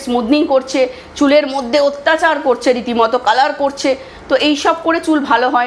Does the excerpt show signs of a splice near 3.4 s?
no; 0 cuts

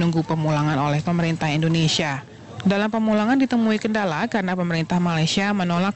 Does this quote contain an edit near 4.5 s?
yes; 1 cut; at 4.5 s

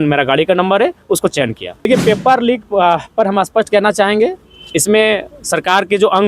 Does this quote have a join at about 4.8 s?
no; 1 cut; at 1.9 s

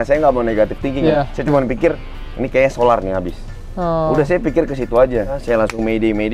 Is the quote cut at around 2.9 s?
no; 2 cuts; at 1.1 s, 5.4 s

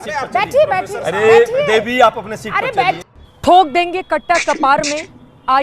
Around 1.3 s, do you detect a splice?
no; 1 cut; at 3.1 s

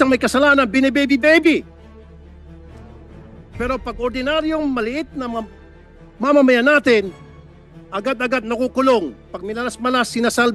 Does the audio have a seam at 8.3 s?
no; 2 cuts; at 1.6 s, 3.6 s

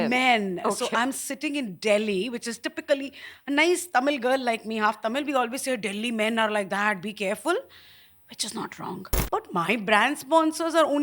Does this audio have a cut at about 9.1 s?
yes; 1 cut; at 9.1 s

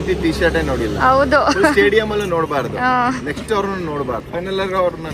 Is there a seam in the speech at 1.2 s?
no; 1 cut; at 4.2 s

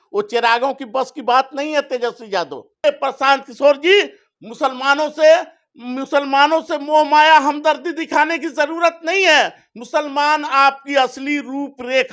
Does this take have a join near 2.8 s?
yes; 1 cut; at 2.8 s

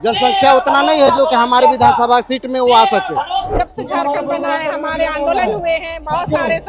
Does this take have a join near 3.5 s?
yes; 1 cut; at 3.5 s

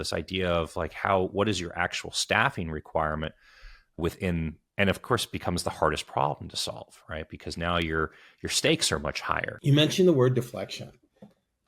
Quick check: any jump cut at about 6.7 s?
no; 1 cut; at 9.5 s

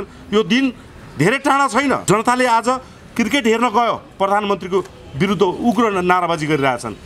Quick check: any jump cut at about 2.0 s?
yes; 1 cut; at 2.0 s

